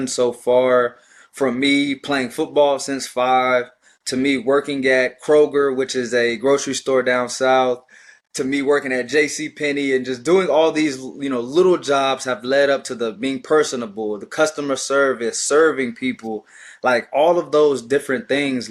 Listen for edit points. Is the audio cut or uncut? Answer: uncut